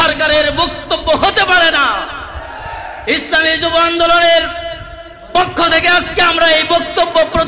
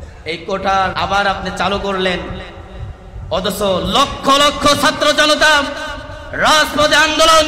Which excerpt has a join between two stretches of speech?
second; 1 cut; at 0.9 s

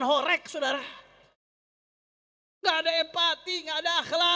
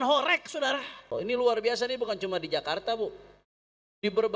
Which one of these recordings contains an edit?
second; 1 cut; at 1.1 s

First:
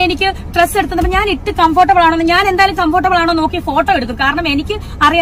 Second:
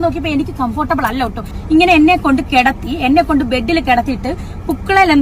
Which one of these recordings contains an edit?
second; 1 cut; at 1.6 s

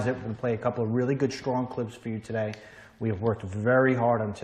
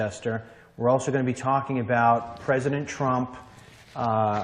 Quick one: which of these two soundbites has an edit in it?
second; 1 cut; at 2.8 s

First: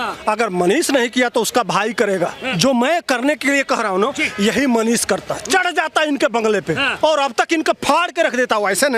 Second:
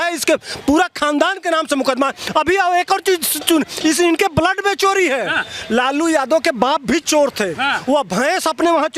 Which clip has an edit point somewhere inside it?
first; 2 cuts; at 2.4 s, 6.9 s

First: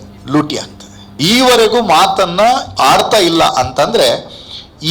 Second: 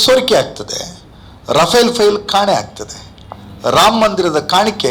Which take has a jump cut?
first; 1 cut; at 1.1 s

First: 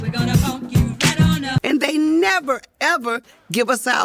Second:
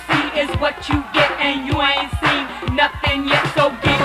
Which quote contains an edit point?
first; 1 cut; at 1.6 s

